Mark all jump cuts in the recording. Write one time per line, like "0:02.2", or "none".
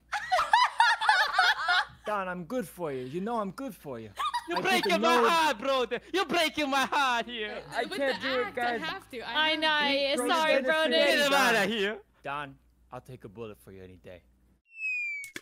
0:02.0
0:07.7
0:14.5

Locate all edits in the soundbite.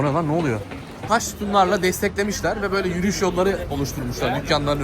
0:01.0

